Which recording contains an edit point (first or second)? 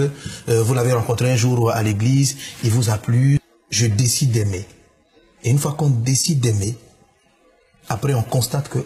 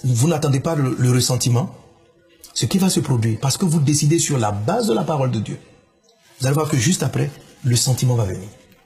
first